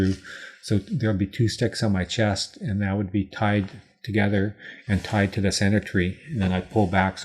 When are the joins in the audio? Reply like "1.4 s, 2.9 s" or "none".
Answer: none